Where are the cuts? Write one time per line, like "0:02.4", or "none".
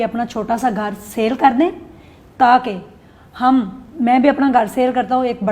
none